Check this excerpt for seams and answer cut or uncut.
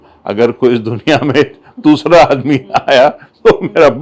uncut